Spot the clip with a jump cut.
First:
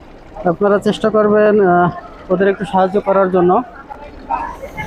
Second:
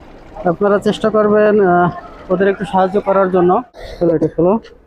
second; 1 cut; at 3.9 s

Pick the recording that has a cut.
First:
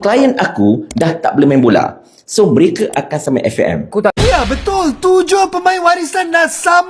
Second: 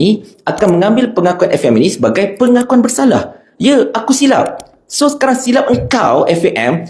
first; 1 cut; at 3.9 s

